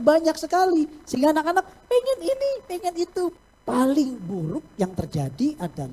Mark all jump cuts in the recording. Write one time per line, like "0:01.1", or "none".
0:03.3